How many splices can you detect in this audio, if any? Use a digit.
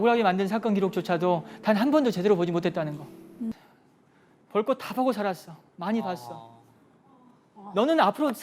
1